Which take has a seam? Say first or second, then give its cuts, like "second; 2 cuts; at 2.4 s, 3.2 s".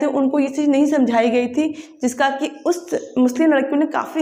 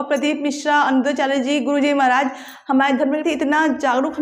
second; 1 cut; at 3.2 s